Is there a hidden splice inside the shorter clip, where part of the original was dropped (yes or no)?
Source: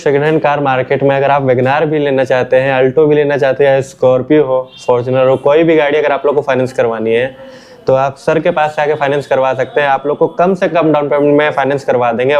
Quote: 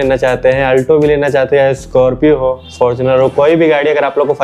no